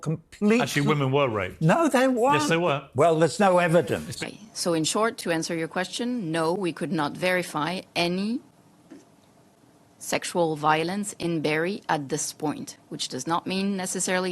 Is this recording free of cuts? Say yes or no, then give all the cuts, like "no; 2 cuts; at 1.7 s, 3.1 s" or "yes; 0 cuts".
no; 1 cut; at 4.2 s